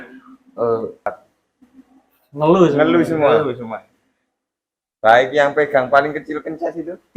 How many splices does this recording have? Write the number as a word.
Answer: one